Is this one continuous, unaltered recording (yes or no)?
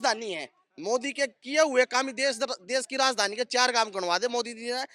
yes